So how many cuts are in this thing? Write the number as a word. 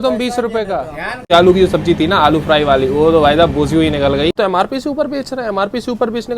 two